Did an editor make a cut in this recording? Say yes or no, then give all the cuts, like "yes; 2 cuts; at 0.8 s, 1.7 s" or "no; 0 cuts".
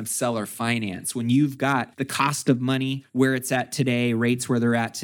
yes; 2 cuts; at 2.0 s, 3.0 s